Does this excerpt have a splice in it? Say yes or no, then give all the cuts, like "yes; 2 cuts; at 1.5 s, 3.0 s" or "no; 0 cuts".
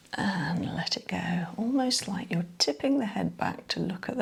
no; 0 cuts